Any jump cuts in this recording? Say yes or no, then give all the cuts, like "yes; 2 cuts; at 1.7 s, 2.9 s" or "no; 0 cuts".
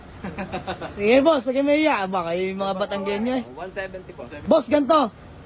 yes; 1 cut; at 4.3 s